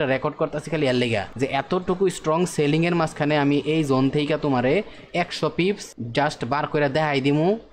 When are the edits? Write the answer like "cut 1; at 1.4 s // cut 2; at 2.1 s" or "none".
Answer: cut 1; at 1.3 s // cut 2; at 5.9 s